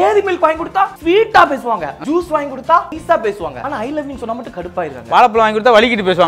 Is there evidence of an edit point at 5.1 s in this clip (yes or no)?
no